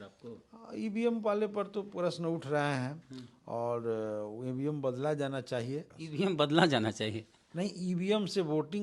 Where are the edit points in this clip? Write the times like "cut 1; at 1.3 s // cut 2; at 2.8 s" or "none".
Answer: cut 1; at 6.0 s